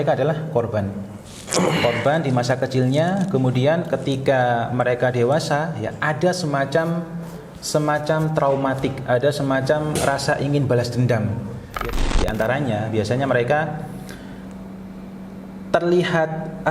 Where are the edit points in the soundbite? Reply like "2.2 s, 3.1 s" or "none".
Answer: 11.8 s

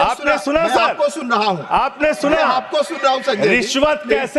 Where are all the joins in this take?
none

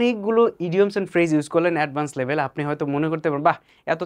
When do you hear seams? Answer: none

